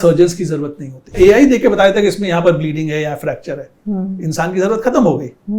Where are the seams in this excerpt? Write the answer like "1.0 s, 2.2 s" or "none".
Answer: 1.1 s